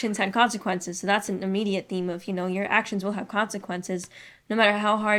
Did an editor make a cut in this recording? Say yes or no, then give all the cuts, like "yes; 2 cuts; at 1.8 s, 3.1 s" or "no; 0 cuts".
no; 0 cuts